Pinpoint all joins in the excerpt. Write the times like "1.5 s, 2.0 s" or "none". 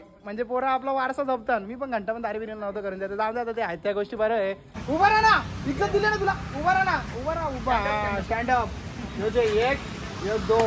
4.7 s